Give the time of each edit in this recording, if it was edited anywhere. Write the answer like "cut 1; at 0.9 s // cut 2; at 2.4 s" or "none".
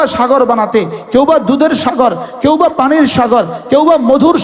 none

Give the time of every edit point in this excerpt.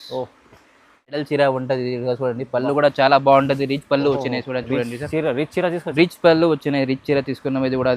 cut 1; at 1.2 s

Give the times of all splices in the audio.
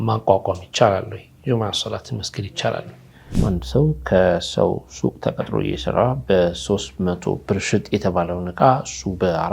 cut 1; at 3.4 s

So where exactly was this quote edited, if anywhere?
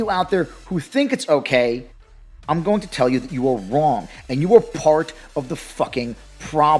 none

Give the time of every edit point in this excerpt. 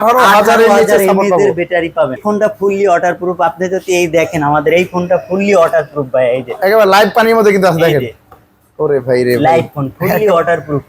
cut 1; at 2.2 s

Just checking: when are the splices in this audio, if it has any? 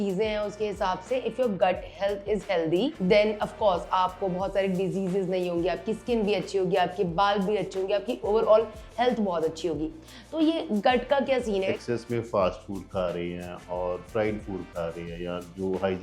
cut 1; at 3.0 s // cut 2; at 8.2 s // cut 3; at 11.6 s

